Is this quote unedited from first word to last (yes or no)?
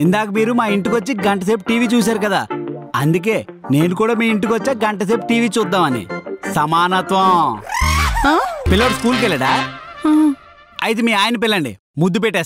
no